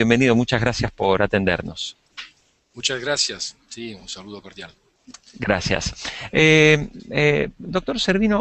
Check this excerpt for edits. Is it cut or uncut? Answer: cut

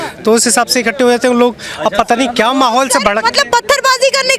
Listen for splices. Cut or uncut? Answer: uncut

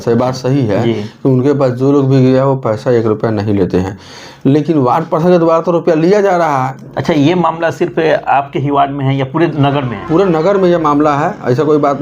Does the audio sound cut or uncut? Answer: cut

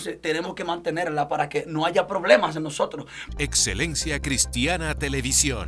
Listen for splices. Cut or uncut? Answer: cut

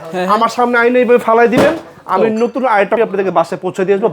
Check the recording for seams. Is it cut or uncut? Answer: cut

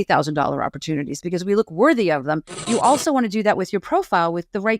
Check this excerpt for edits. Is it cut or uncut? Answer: cut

